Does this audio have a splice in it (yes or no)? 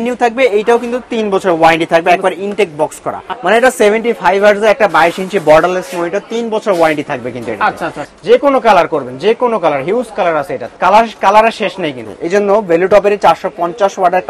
yes